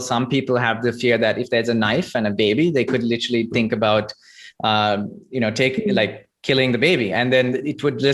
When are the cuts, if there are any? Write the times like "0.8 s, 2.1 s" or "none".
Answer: none